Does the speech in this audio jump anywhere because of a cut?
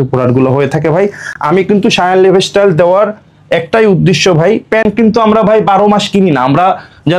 no; 0 cuts

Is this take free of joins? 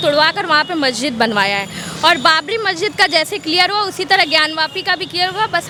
yes; 0 cuts

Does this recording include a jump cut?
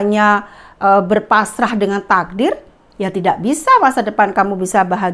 no; 0 cuts

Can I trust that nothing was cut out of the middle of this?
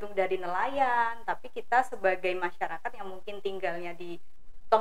yes; 0 cuts

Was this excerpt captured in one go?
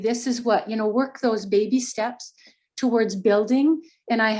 yes; 0 cuts

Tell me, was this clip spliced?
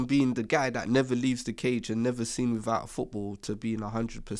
no; 0 cuts

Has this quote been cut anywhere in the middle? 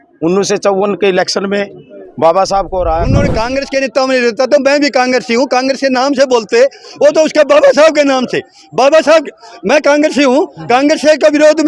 yes; 1 cut; at 3.2 s

